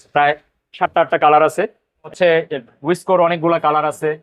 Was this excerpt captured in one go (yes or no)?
no